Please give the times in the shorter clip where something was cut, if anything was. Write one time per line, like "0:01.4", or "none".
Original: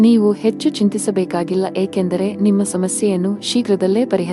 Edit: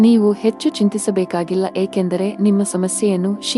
none